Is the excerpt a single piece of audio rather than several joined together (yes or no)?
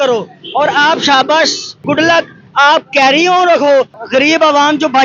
no